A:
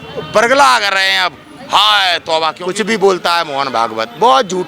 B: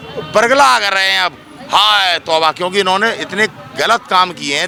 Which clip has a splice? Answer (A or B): A